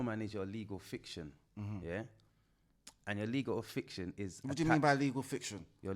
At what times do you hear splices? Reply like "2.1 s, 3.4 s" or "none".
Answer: none